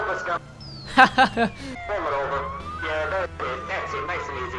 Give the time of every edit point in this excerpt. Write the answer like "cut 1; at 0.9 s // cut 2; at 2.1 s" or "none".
cut 1; at 1.7 s // cut 2; at 2.7 s

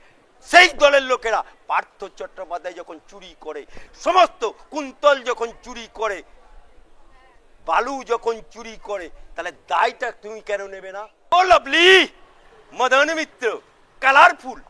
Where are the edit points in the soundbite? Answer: cut 1; at 11.3 s

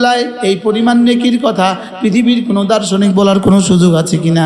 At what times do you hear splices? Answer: none

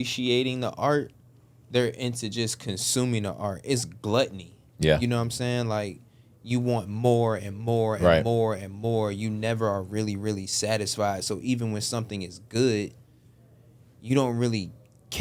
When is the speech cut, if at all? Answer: none

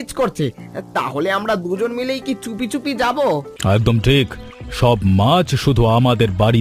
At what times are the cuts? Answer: cut 1; at 3.5 s

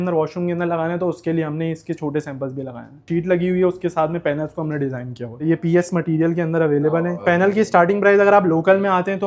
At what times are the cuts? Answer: cut 1; at 3.1 s // cut 2; at 5.4 s // cut 3; at 7.2 s

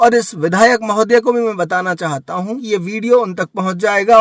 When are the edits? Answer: cut 1; at 2.6 s

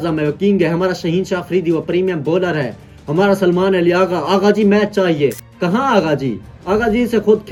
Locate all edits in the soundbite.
none

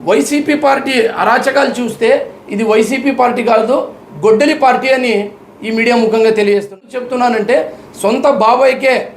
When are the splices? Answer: cut 1; at 6.9 s

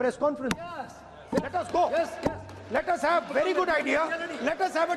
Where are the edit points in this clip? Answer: none

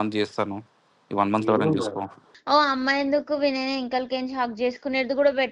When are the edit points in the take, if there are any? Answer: cut 1; at 2.3 s

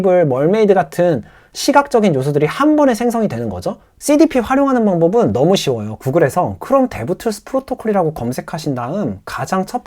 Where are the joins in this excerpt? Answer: cut 1; at 3.8 s

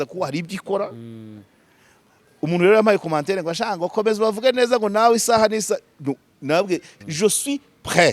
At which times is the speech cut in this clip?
cut 1; at 6.9 s

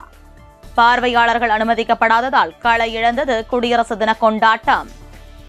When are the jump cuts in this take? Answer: none

